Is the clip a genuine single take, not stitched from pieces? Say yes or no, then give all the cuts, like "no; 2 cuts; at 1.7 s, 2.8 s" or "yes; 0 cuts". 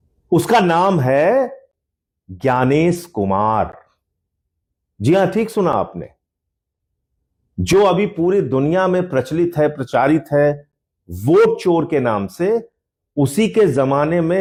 yes; 0 cuts